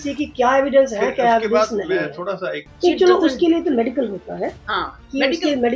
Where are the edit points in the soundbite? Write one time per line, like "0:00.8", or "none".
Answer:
0:02.6